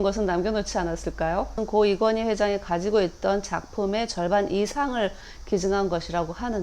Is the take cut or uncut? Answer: cut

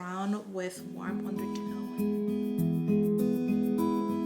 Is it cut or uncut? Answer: cut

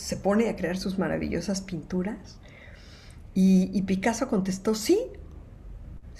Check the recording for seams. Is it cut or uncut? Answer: uncut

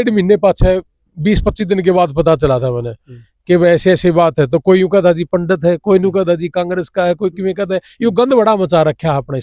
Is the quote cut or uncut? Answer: uncut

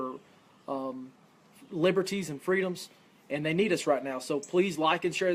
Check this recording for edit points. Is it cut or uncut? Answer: uncut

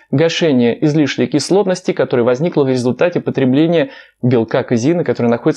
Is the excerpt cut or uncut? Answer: uncut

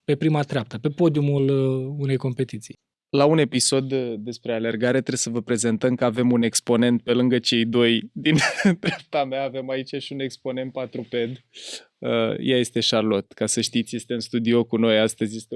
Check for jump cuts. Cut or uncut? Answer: uncut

